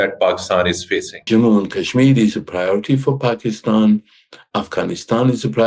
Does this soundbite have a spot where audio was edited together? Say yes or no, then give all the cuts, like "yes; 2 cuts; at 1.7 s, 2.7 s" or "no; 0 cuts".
yes; 1 cut; at 1.3 s